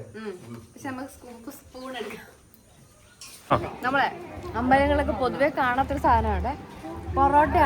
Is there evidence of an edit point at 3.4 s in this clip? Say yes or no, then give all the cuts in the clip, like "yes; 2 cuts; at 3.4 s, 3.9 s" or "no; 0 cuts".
yes; 1 cut; at 3.4 s